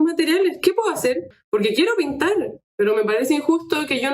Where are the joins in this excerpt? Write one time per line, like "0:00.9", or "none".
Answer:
0:01.3